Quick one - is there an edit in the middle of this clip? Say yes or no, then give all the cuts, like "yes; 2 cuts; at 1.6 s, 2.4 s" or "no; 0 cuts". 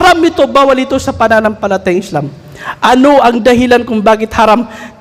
no; 0 cuts